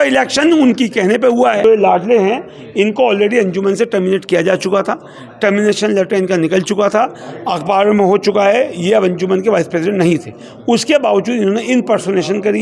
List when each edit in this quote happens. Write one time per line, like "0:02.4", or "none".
0:01.6